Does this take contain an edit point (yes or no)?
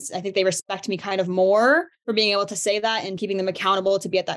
yes